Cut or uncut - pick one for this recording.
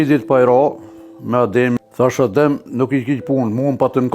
cut